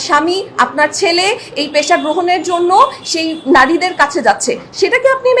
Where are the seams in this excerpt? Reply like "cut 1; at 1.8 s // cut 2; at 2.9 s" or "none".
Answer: none